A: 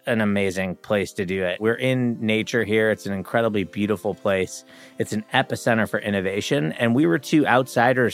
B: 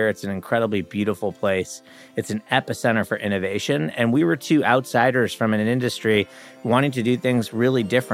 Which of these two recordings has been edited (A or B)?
A